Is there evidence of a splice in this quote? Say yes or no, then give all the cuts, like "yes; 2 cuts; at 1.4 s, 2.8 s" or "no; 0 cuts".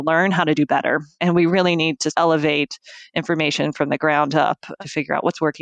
yes; 1 cut; at 2.1 s